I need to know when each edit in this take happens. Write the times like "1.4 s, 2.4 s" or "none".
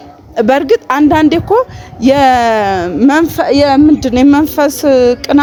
none